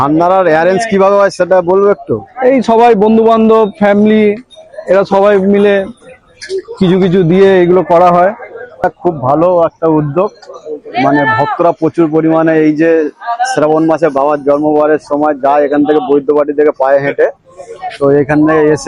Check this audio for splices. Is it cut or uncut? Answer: cut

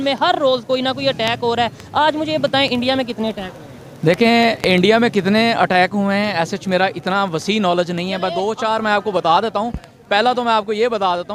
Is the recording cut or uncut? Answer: uncut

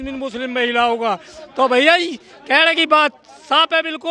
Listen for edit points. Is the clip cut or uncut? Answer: uncut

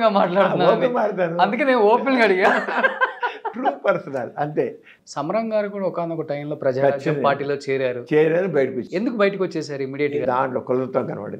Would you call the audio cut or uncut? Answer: cut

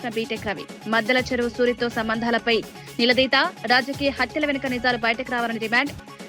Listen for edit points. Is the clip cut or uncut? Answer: uncut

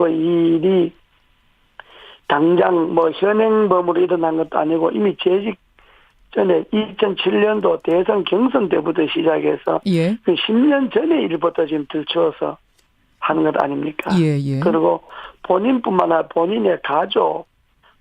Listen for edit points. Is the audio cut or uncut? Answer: cut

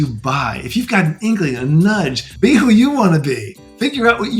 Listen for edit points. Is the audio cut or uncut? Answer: cut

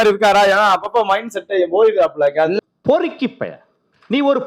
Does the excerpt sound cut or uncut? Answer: uncut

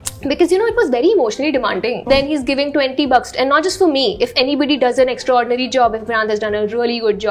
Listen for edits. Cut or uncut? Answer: cut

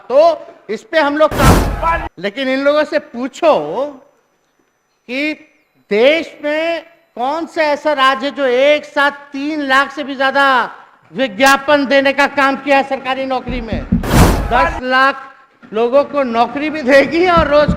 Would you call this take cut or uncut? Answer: cut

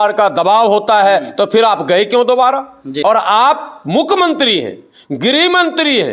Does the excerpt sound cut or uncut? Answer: cut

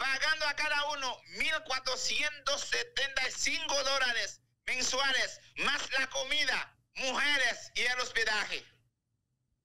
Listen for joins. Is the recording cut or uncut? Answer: uncut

